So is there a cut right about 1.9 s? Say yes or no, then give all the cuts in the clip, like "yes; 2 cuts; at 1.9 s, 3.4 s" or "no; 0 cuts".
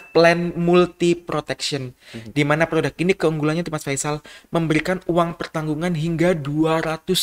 no; 0 cuts